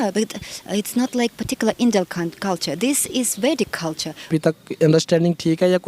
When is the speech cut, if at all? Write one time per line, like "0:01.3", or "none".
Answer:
0:04.1

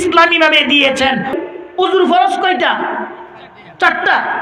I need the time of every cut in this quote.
0:01.3

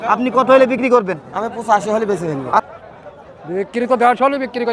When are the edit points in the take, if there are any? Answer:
0:02.6

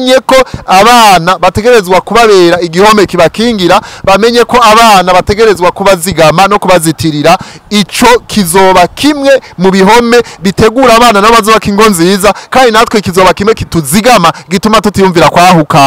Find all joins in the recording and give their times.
none

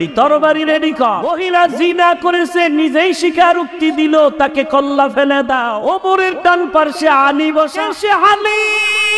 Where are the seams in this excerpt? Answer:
0:01.3
0:05.7
0:07.9

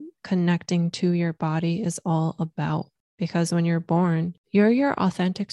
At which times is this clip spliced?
0:03.0
0:04.4

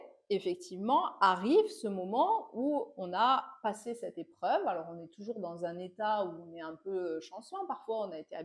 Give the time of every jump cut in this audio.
none

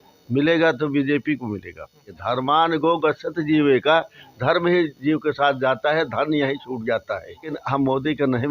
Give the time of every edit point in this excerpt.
0:02.2
0:07.6

